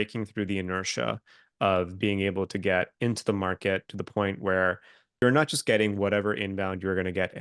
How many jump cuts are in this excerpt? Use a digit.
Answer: 1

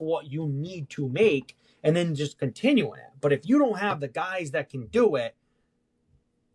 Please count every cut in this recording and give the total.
0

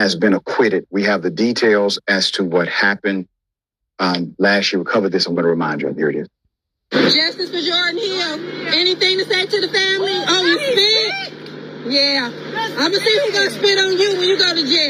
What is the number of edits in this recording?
1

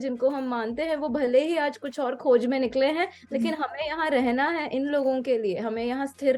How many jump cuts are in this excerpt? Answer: 0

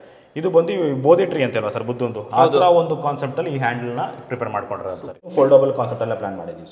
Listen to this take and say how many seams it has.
1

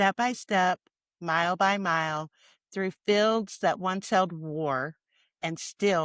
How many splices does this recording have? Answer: 0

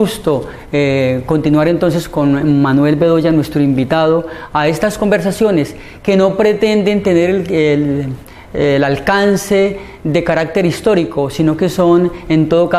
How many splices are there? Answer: 1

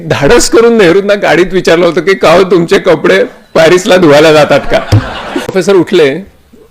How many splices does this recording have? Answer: 1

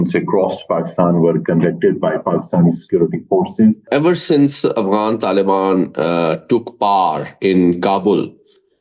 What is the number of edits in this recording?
1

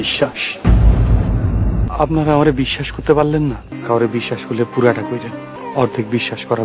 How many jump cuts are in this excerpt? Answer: 3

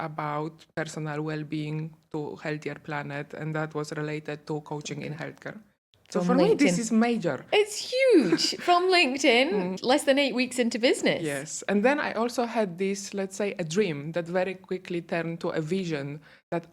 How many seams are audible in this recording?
1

